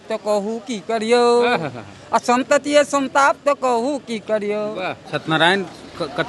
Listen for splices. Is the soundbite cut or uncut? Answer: cut